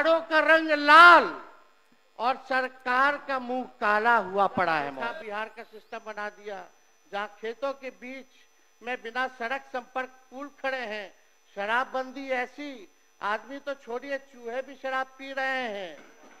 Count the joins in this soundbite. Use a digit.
1